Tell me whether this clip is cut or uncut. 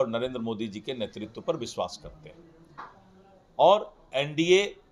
uncut